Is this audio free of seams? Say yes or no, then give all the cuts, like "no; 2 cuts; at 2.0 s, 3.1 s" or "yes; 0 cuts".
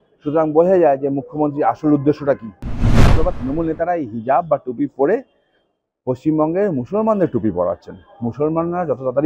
no; 1 cut; at 3.0 s